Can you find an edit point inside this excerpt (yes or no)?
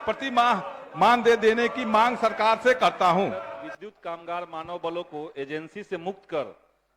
yes